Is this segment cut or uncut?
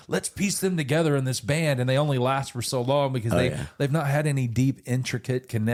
uncut